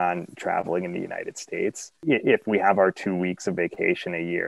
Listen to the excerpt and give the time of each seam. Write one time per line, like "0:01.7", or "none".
0:01.9